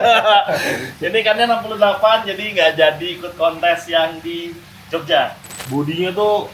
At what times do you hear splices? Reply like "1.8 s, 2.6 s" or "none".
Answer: 5.5 s